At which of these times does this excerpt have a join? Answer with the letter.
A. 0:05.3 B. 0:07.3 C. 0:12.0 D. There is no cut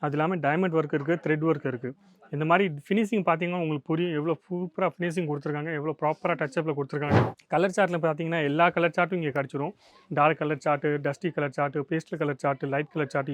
B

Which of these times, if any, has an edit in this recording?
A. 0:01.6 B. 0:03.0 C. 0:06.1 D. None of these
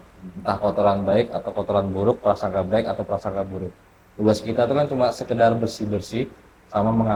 D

